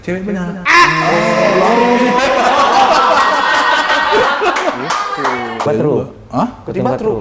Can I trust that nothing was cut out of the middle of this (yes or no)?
no